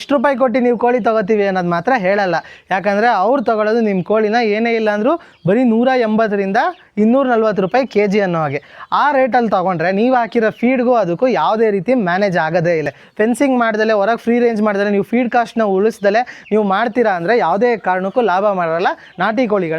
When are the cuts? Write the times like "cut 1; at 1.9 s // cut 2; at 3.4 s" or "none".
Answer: cut 1; at 13.0 s

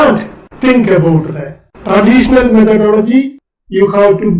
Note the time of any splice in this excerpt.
cut 1; at 3.4 s

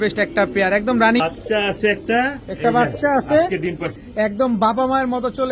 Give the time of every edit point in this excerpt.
cut 1; at 1.2 s // cut 2; at 4.0 s

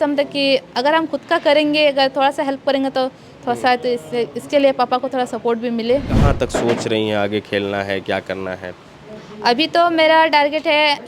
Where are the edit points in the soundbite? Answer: cut 1; at 6.2 s

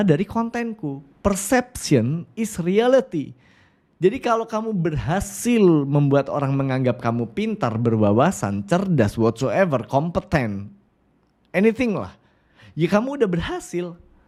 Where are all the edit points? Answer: none

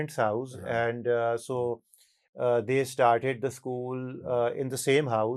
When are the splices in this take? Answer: none

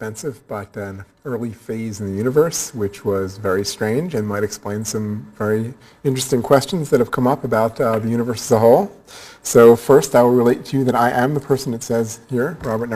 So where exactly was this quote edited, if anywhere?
cut 1; at 6.0 s

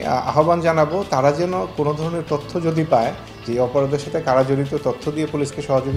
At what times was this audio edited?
none

